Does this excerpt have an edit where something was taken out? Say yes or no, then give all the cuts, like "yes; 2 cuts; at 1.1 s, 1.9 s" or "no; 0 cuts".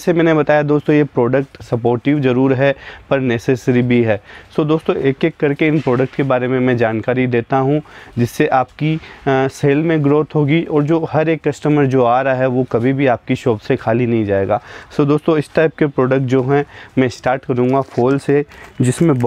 no; 0 cuts